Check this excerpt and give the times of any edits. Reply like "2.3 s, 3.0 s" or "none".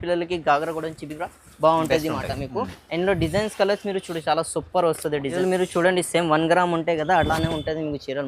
5.4 s